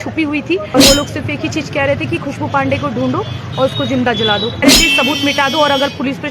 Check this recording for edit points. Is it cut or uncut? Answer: cut